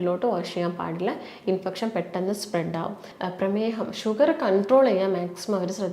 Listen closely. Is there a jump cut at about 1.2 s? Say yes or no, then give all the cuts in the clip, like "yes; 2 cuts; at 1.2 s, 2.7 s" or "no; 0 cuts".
no; 1 cut; at 3.1 s